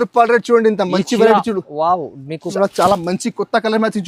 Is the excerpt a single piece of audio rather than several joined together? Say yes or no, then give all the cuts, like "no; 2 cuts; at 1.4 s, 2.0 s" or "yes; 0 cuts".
no; 1 cut; at 2.5 s